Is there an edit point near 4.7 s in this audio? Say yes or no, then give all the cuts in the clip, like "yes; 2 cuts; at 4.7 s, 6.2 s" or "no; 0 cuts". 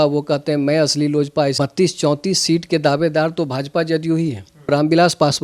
yes; 2 cuts; at 1.6 s, 4.7 s